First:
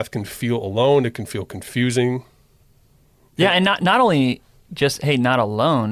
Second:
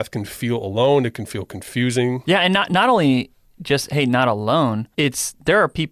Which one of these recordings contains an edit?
second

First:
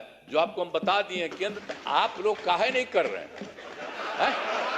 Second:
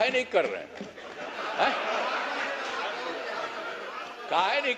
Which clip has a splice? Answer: first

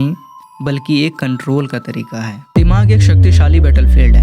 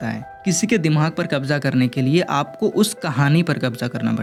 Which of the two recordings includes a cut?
first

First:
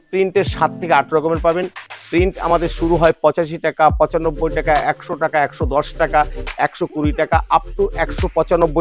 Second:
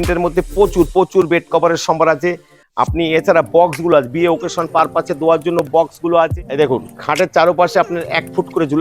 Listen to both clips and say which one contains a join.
second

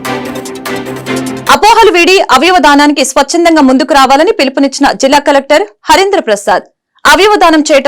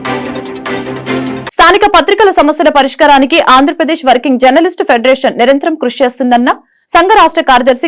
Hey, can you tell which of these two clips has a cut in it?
first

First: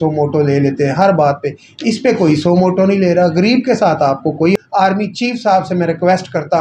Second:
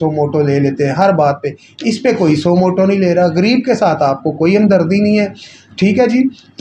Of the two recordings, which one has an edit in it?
first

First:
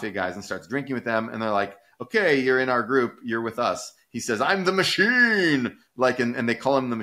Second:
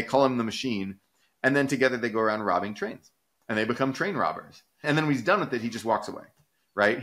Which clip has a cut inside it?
second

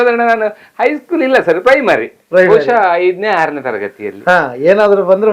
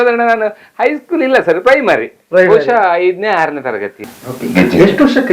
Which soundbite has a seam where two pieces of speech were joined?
second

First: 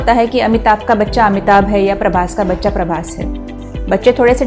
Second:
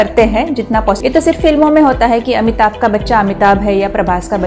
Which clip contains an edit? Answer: second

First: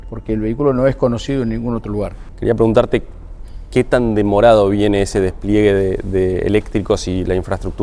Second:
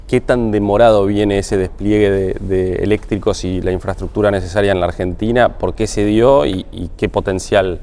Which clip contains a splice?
first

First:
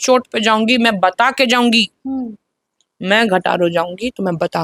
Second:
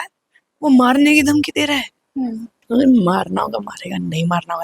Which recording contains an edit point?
second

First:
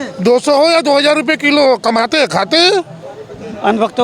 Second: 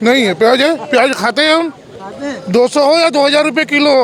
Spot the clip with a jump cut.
first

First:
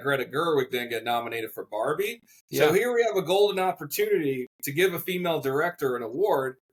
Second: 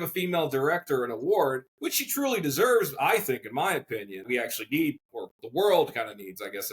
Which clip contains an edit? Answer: second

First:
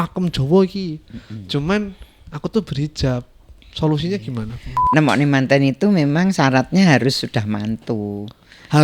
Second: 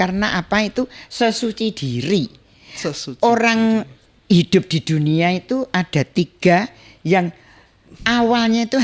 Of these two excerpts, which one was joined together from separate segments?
first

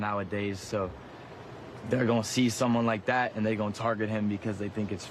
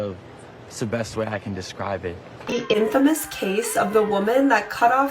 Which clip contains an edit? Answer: second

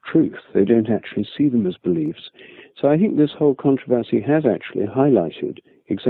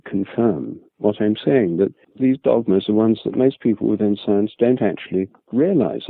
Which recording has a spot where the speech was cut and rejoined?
second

